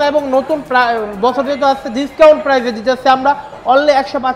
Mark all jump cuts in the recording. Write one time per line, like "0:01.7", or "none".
none

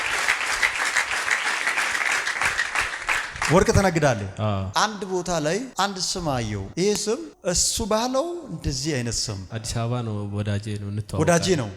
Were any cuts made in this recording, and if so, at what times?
0:04.6

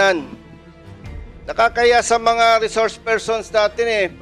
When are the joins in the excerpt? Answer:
none

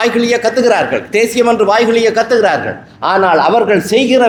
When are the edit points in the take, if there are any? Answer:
none

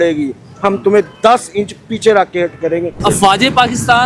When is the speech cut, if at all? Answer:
0:03.0

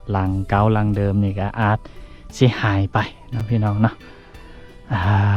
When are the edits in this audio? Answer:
none

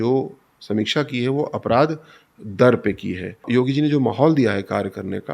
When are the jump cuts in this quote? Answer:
0:03.5

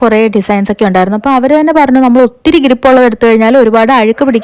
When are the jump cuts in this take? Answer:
none

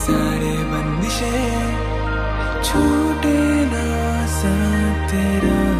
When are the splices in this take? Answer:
none

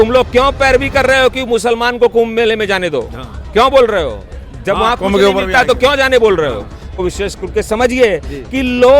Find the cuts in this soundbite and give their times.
0:06.9

